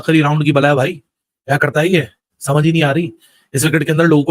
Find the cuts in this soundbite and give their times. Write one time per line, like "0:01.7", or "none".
none